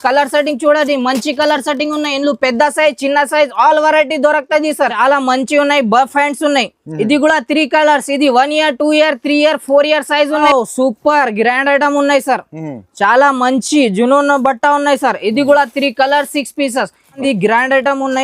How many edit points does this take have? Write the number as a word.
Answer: three